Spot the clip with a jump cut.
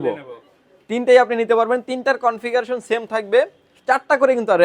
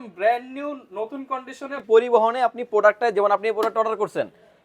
second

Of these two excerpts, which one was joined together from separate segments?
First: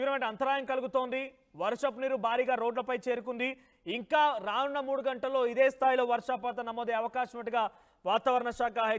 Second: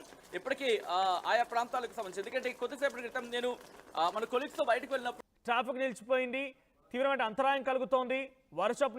second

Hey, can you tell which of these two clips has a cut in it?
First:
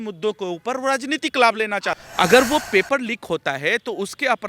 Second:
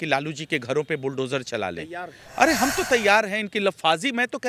first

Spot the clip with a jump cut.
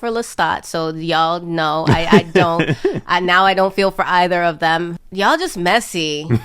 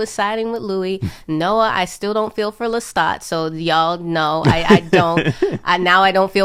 first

